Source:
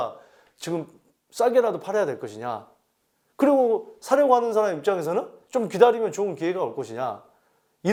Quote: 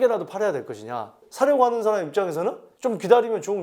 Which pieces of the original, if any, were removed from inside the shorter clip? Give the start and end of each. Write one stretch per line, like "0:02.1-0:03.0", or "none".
0:02.8-0:03.9

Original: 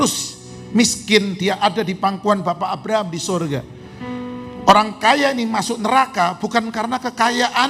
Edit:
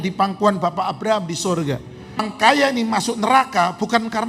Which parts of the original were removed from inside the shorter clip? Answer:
0:04.1-0:04.9

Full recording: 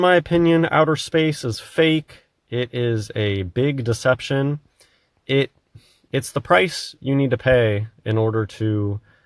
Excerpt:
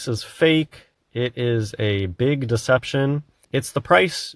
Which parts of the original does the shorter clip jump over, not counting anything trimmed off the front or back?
0:04.7-0:05.9

